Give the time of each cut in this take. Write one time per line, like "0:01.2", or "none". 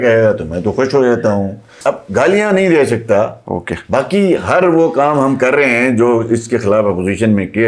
0:01.7